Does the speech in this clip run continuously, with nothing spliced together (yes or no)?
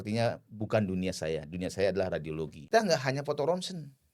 no